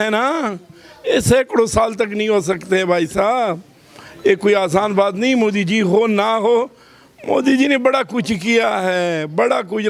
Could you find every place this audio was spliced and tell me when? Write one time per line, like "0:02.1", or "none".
none